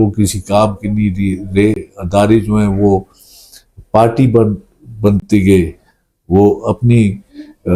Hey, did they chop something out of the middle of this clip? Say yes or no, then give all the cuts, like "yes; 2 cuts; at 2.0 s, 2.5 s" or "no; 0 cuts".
no; 0 cuts